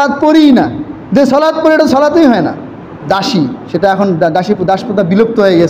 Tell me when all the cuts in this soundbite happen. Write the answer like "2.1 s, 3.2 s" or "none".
3.0 s